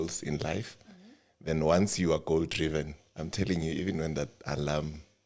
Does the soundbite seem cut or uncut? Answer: uncut